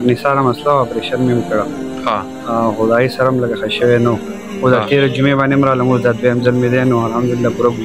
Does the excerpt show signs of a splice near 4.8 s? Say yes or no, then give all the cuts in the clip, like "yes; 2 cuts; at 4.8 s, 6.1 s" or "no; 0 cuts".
no; 0 cuts